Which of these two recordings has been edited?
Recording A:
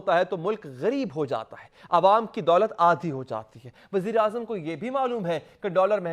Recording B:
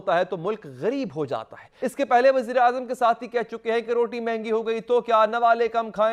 B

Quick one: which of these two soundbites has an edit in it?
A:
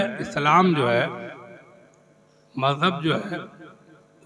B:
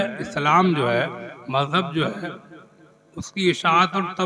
B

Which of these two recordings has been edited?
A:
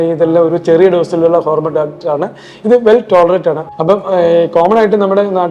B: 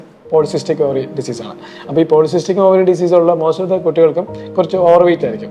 A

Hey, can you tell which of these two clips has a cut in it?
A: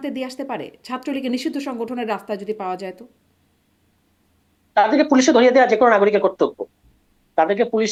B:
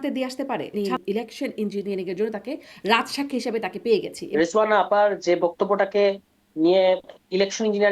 B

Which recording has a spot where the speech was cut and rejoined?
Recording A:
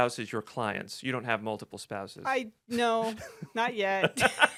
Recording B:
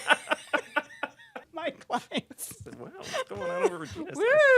B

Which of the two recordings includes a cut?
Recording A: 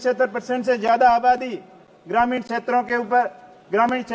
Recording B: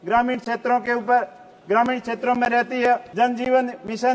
B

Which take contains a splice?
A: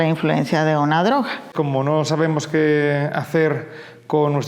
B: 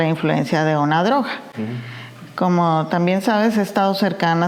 A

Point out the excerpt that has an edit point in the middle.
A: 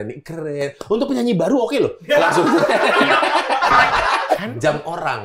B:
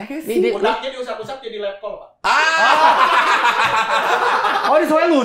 A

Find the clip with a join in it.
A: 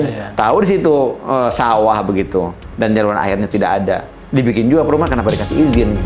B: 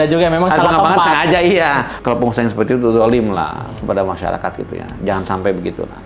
B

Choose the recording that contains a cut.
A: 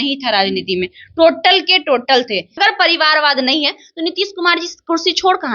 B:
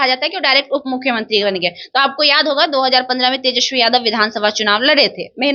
A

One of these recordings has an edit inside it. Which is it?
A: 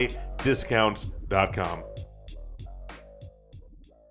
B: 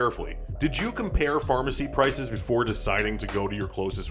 A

